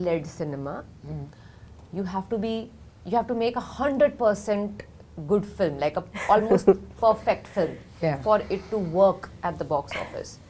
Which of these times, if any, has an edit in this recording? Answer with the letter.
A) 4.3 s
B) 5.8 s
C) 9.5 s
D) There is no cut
D